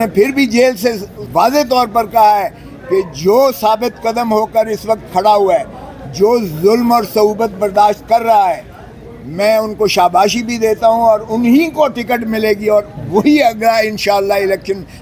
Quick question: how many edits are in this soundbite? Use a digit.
1